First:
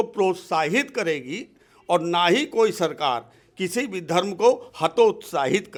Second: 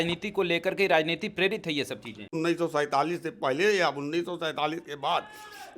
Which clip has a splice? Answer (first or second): second